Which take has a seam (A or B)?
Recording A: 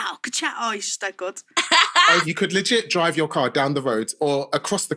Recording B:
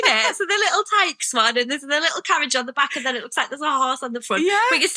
A